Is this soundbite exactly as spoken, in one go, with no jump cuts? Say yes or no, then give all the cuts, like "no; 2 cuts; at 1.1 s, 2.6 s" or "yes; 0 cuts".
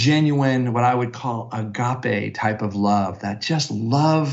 yes; 0 cuts